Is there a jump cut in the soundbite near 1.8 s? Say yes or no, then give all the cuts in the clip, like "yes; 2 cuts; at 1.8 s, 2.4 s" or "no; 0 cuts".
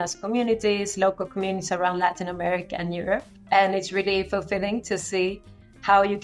no; 1 cut; at 3.3 s